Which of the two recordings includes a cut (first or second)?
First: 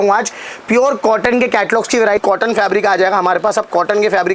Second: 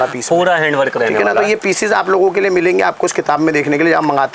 first